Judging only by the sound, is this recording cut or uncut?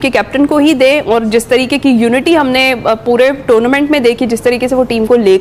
uncut